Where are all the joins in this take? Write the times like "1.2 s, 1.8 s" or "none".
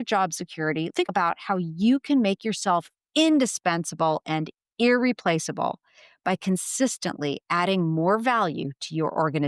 1.0 s, 3.0 s

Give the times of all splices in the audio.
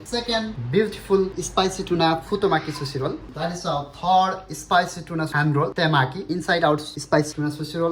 none

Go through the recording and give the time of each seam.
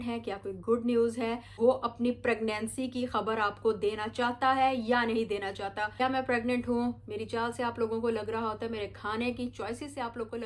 1.6 s, 6.0 s

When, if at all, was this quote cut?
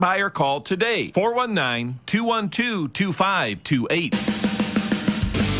4.1 s

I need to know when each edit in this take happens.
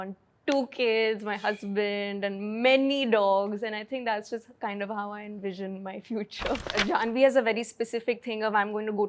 6.6 s

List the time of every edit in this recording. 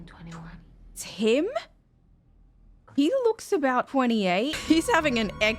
4.5 s

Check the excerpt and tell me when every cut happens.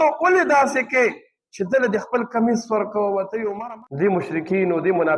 3.5 s

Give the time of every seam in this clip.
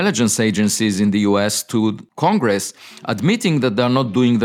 2.1 s

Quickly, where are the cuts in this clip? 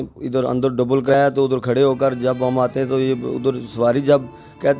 1.1 s

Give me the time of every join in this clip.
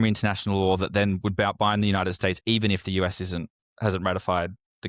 3.6 s

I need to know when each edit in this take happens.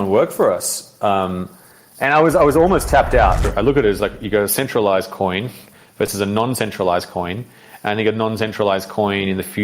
3.5 s

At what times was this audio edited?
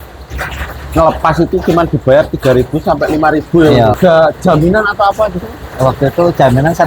4.0 s

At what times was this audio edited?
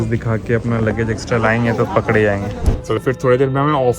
3.0 s

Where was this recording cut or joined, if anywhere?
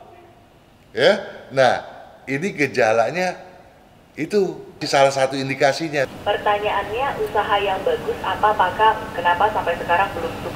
6.1 s

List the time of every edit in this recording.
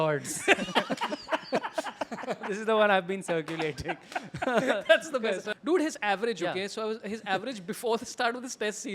5.5 s

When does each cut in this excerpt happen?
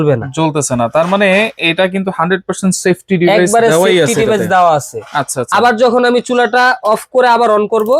none

